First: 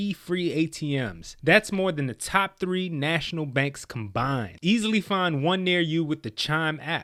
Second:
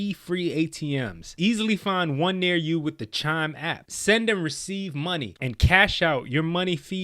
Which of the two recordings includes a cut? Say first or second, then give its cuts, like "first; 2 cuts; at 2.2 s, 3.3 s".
second; 2 cuts; at 1.3 s, 5.3 s